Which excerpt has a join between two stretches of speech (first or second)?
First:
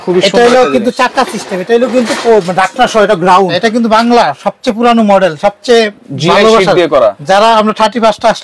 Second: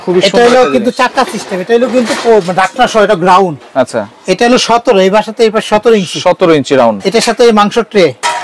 first